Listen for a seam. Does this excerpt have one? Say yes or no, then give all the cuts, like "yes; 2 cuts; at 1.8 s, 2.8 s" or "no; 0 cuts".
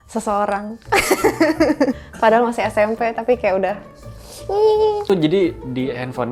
no; 0 cuts